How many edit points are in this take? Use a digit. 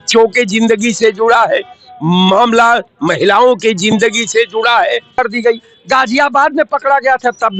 1